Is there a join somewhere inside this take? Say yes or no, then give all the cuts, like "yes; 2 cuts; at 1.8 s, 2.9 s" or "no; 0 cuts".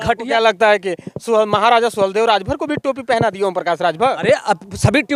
no; 0 cuts